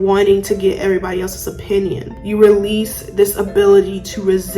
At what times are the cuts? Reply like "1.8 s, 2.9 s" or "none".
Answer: 2.1 s